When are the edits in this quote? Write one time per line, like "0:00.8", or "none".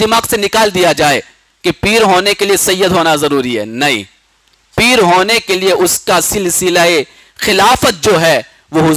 none